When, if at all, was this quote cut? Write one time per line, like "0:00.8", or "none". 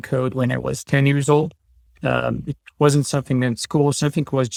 none